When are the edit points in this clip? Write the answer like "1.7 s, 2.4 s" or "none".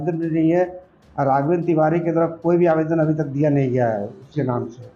none

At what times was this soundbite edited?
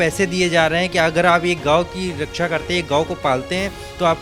none

